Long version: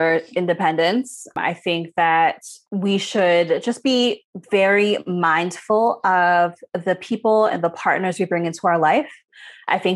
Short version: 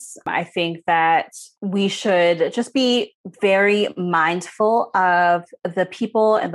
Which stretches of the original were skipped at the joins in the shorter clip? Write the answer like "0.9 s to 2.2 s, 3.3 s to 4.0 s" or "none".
none